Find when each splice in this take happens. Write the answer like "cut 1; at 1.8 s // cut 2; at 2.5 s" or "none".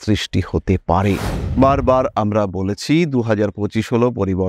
cut 1; at 1.3 s